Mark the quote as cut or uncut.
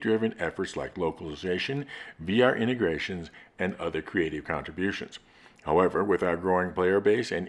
cut